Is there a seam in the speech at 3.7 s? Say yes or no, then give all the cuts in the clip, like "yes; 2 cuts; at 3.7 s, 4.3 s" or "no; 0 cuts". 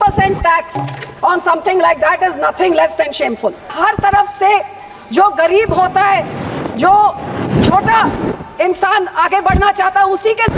yes; 1 cut; at 3.7 s